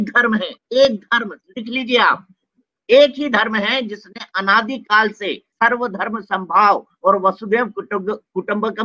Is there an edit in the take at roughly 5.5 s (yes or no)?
yes